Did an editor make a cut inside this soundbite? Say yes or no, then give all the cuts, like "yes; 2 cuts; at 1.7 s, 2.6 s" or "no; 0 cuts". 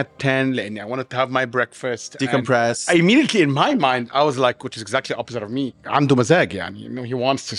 yes; 2 cuts; at 2.8 s, 5.8 s